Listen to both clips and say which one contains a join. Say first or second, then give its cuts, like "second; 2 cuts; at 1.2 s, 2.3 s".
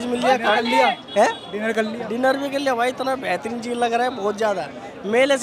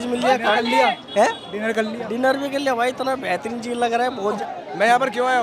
second; 1 cut; at 4.4 s